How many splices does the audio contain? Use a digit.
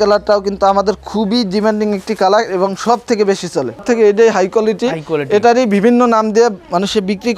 1